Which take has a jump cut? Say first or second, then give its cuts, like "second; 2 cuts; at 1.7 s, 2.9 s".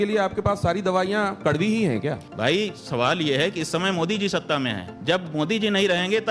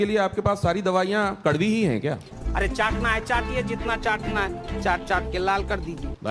first; 2 cuts; at 2.3 s, 4.9 s